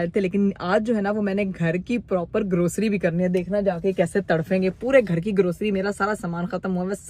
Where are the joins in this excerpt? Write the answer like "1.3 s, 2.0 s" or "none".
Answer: none

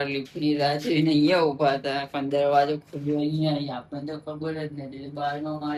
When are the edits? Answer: none

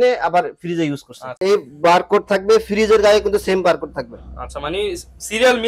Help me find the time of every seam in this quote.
1.4 s

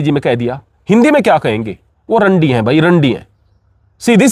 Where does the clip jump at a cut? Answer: none

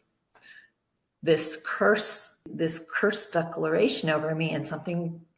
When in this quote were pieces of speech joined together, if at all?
2.5 s

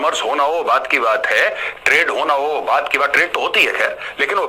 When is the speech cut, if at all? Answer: none

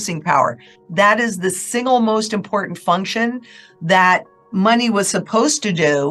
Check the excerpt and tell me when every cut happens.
none

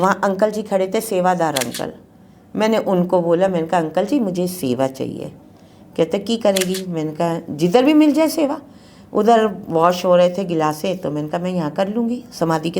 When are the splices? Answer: none

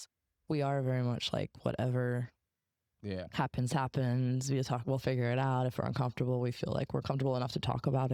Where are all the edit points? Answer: none

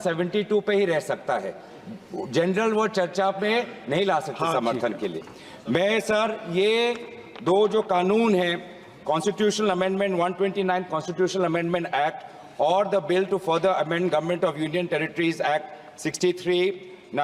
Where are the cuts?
none

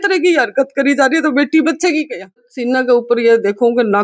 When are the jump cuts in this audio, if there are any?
2.5 s

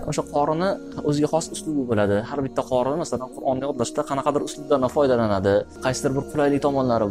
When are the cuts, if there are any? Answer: 0.9 s, 5.7 s

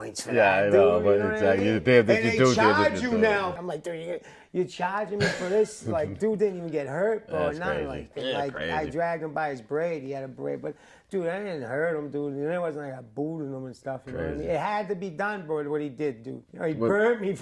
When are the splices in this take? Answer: 3.6 s, 8.1 s, 16.5 s

